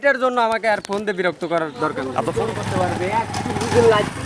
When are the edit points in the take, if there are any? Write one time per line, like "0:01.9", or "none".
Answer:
0:02.1